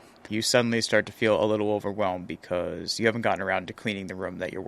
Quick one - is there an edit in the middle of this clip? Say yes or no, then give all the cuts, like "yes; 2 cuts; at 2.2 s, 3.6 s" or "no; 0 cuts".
no; 0 cuts